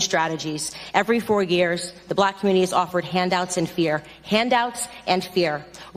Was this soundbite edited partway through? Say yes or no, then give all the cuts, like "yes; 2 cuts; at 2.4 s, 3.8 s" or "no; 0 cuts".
no; 0 cuts